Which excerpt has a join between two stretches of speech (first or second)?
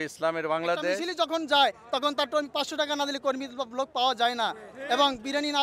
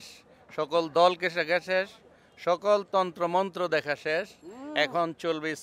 first